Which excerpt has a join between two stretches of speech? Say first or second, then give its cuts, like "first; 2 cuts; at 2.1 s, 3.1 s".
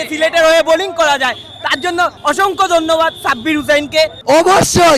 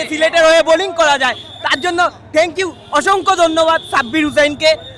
first; 2 cuts; at 2.2 s, 4.2 s